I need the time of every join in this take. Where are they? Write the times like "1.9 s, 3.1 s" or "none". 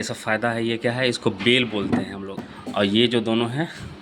2.4 s